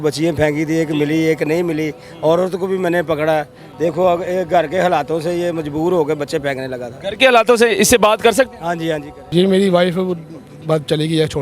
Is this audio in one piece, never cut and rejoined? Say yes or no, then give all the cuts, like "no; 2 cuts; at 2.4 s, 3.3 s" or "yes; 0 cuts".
no; 1 cut; at 9.1 s